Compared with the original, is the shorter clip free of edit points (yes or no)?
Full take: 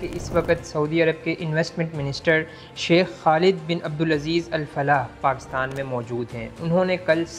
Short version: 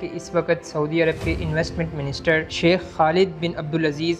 no